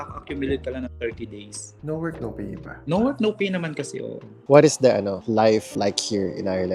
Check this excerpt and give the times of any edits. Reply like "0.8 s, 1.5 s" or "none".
1.7 s, 4.4 s